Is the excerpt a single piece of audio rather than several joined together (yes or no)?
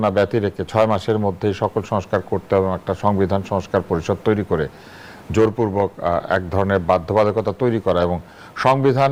yes